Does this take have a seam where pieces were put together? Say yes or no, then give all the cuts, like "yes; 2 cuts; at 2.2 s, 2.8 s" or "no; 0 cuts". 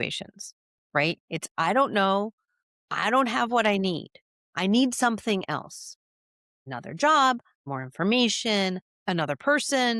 yes; 3 cuts; at 6.7 s, 7.6 s, 8.9 s